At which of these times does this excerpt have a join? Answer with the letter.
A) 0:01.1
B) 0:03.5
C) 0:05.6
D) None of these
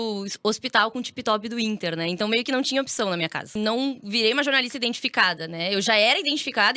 B